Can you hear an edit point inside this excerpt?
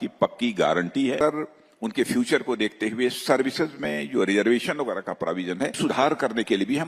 yes; 2 cuts; at 1.2 s, 5.8 s

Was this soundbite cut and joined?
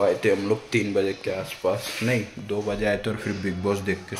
no; 0 cuts

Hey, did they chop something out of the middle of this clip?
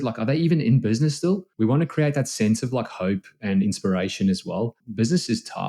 yes; 2 cuts; at 1.5 s, 4.8 s

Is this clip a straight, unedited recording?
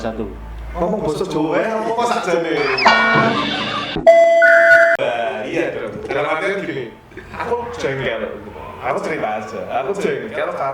no; 1 cut; at 5.0 s

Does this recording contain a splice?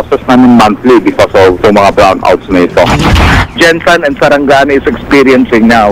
yes; 1 cut; at 3.4 s

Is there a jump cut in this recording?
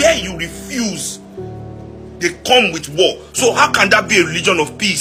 no; 0 cuts

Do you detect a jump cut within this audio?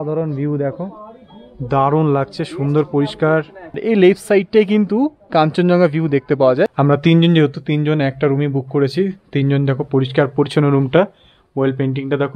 yes; 2 cuts; at 3.8 s, 6.8 s

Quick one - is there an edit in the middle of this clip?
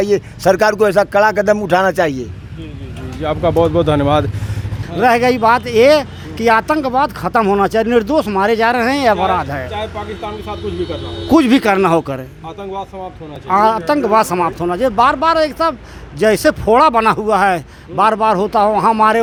no; 0 cuts

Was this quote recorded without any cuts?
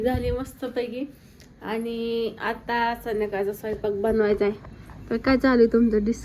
yes; 0 cuts

